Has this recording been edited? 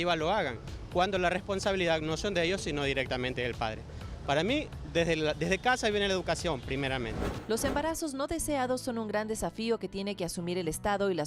yes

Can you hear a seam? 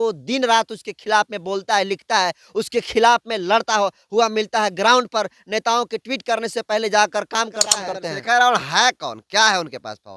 yes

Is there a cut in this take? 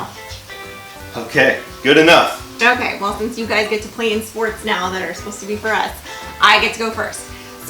yes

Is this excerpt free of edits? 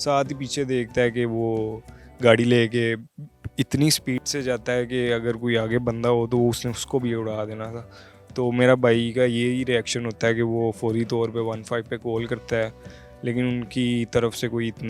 yes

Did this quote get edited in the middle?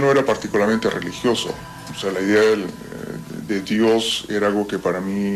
yes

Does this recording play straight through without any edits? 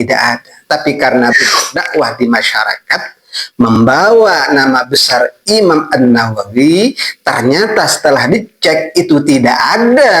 no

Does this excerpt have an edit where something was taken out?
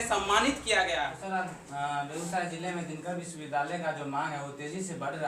yes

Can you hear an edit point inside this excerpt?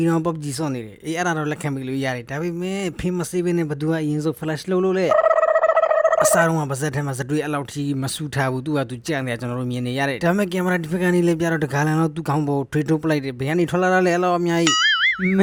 no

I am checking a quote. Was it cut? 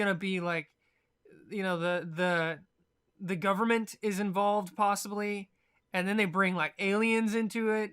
yes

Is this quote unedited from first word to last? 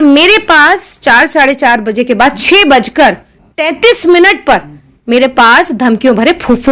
yes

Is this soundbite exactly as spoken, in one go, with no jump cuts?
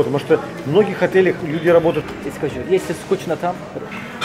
no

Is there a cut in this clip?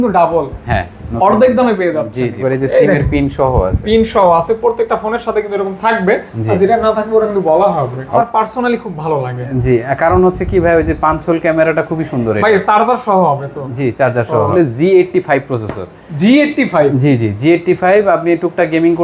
yes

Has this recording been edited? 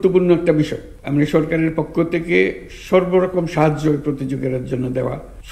no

